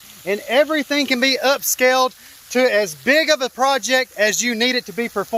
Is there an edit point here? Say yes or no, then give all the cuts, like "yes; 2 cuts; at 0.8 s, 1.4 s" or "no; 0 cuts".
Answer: no; 0 cuts